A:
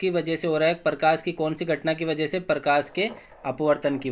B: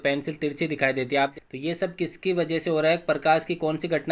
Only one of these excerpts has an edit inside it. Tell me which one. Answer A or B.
B